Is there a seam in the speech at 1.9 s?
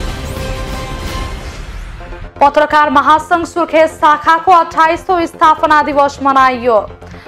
yes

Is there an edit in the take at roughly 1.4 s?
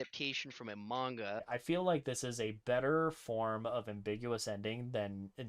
yes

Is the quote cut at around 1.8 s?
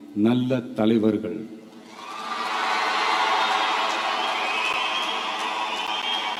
no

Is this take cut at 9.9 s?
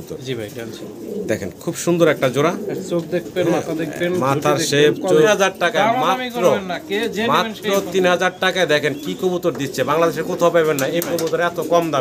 no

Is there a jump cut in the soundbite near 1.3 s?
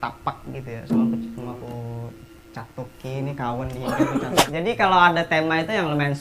no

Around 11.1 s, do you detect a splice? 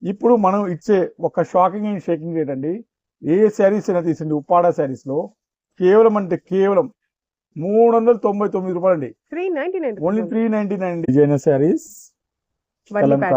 yes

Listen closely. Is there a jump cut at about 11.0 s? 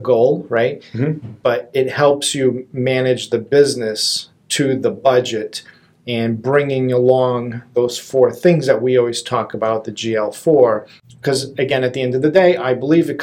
yes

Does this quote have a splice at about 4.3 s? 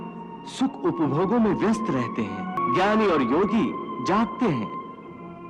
no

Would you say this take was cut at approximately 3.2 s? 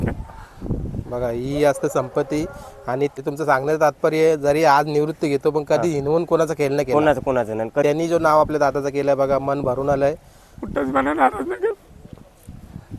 yes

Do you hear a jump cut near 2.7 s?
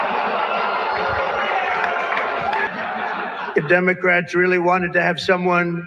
yes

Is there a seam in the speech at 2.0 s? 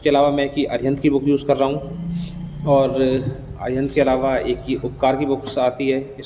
no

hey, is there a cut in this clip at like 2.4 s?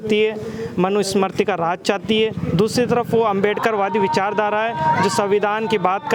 no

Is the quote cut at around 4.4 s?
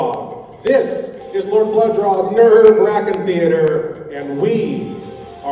yes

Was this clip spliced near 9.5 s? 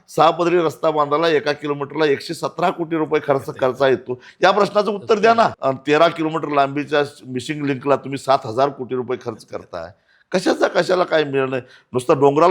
no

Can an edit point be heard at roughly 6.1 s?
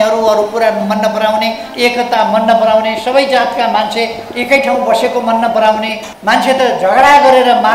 yes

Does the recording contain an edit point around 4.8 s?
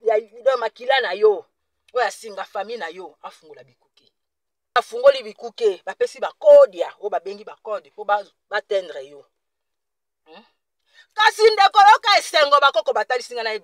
yes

